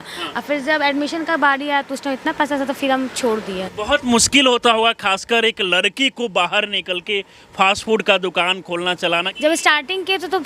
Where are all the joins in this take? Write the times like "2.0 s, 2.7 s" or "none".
3.7 s, 9.3 s

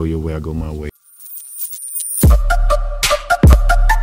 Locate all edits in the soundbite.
1.0 s

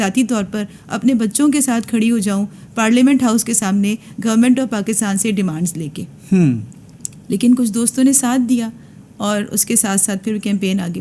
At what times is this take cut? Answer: none

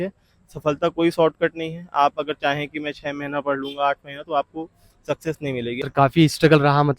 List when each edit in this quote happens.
5.8 s

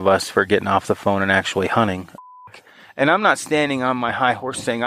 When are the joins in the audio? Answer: 2.2 s

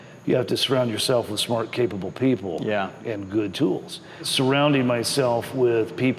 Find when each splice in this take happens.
3.0 s, 4.2 s

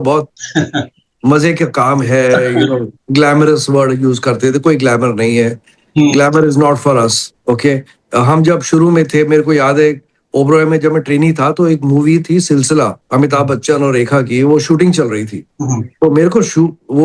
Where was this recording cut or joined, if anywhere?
none

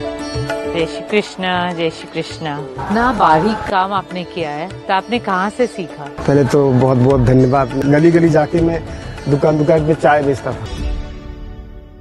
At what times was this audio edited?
7.8 s, 10.6 s

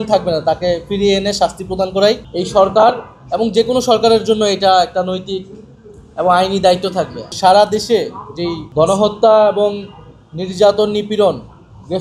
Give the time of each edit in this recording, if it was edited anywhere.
2.3 s, 7.2 s, 8.6 s

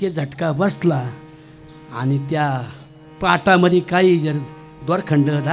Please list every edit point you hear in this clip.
none

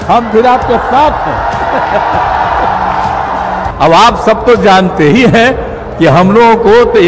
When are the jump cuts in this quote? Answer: 3.7 s

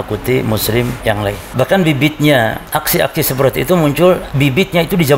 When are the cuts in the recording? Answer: 1.0 s, 2.6 s, 4.3 s

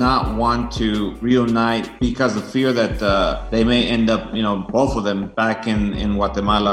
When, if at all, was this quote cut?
1.2 s, 1.9 s, 3.4 s, 4.8 s

